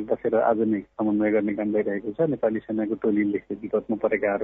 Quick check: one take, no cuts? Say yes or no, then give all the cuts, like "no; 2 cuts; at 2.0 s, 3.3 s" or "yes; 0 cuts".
no; 1 cut; at 3.5 s